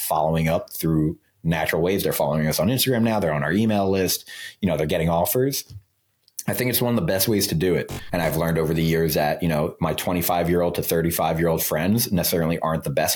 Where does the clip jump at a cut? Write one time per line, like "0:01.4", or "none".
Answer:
0:08.0